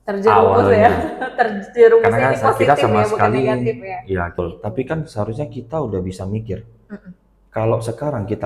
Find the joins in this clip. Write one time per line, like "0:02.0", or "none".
0:04.4